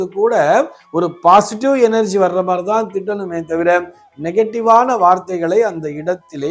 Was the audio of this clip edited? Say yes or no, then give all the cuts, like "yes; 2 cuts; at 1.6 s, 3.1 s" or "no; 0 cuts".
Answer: no; 0 cuts